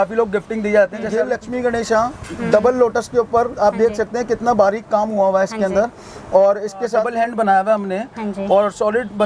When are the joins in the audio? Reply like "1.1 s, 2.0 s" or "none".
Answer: 1.2 s, 7.1 s